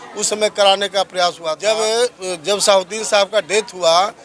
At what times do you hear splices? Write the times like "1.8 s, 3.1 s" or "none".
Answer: 1.6 s